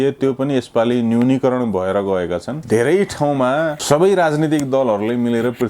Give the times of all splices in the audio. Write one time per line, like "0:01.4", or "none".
0:02.5
0:03.8